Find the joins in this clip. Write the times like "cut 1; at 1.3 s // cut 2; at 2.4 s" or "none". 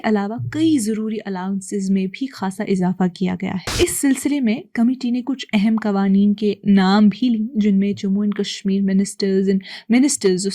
cut 1; at 3.6 s